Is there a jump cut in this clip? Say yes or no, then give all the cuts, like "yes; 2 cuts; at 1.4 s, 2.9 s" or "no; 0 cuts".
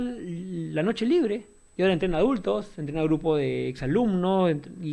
no; 0 cuts